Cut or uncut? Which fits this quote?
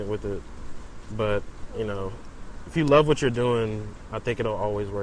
uncut